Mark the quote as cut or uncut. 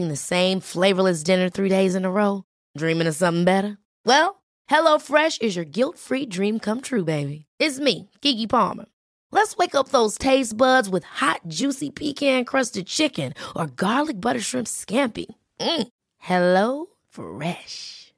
uncut